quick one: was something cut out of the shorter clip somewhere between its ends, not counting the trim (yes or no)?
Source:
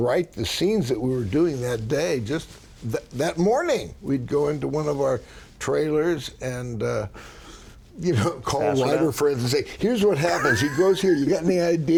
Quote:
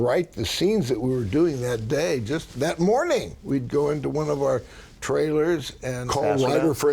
yes